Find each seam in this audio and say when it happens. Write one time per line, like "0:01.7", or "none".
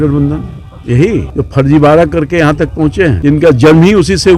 0:01.3
0:03.2